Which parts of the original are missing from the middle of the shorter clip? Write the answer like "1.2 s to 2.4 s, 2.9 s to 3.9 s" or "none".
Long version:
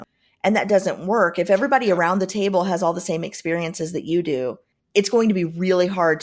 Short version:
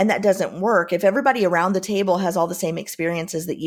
none